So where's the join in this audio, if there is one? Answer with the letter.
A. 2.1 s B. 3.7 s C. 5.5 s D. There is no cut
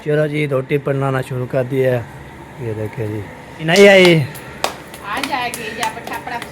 B